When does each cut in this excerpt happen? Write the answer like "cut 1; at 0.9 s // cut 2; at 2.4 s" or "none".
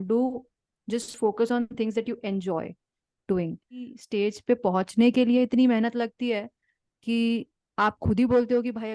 cut 1; at 4.0 s